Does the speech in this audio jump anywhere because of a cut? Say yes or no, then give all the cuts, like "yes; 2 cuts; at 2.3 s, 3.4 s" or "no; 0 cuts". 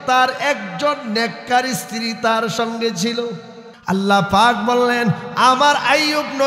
yes; 1 cut; at 3.7 s